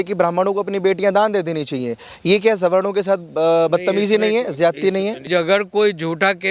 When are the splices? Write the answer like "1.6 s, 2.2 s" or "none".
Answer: 5.3 s